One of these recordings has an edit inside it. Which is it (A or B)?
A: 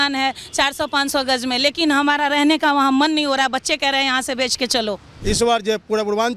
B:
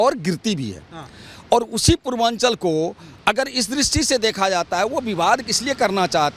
A